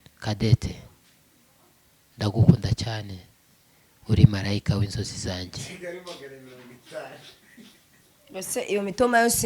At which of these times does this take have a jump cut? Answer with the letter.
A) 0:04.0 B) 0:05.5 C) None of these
C